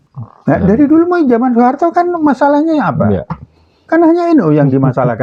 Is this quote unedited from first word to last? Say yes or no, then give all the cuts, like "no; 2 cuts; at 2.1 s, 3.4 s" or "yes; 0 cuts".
yes; 0 cuts